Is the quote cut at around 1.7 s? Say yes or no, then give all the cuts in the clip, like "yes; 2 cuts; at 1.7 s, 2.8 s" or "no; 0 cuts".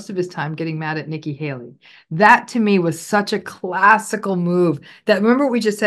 no; 0 cuts